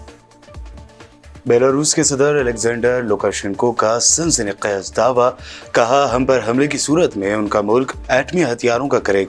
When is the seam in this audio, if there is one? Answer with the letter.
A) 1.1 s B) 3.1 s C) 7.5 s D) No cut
A